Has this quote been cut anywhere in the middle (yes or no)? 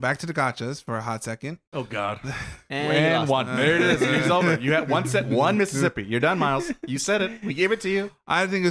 yes